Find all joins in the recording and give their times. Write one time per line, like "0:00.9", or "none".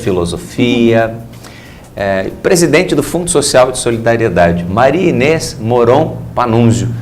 0:05.5